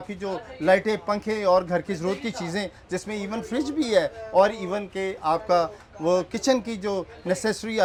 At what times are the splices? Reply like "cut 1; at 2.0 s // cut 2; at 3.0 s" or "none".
none